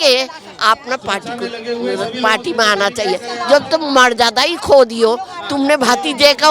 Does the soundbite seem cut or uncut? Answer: uncut